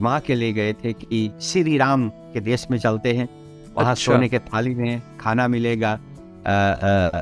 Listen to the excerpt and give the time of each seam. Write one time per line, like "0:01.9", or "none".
none